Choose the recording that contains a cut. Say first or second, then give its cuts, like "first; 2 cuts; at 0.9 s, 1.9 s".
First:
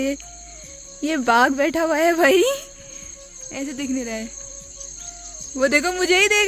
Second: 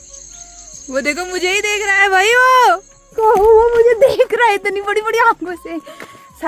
second; 1 cut; at 3.1 s